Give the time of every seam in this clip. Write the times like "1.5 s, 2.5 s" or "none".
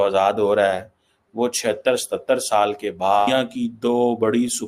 3.2 s

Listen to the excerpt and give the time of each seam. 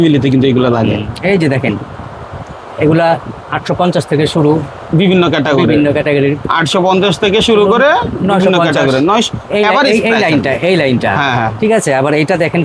none

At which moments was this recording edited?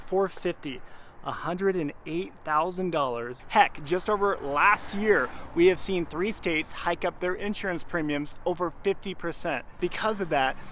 3.4 s, 9.8 s

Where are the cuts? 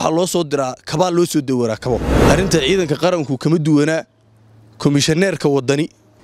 2.1 s

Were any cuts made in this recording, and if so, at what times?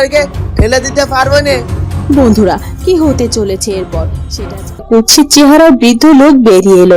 4.8 s

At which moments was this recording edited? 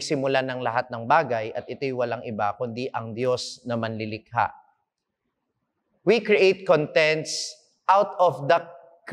none

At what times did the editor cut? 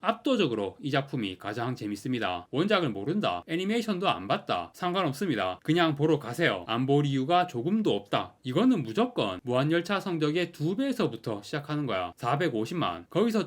2.5 s, 8.4 s

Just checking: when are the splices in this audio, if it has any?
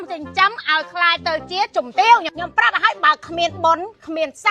2.3 s

